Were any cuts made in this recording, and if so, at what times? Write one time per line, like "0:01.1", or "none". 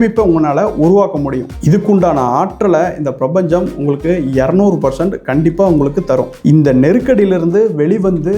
none